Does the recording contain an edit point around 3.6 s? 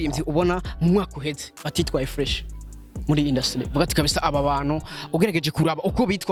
no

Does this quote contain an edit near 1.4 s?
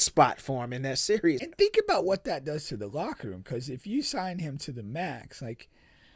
yes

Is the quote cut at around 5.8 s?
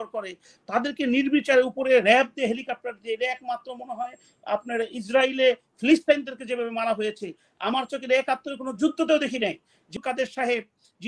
no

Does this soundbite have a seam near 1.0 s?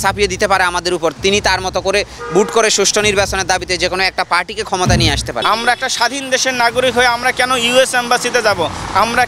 no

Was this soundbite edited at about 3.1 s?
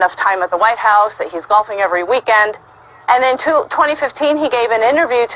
no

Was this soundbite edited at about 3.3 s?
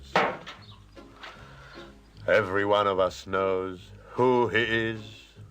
yes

